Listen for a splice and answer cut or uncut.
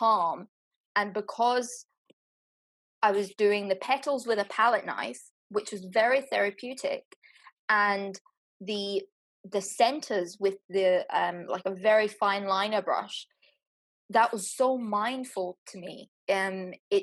uncut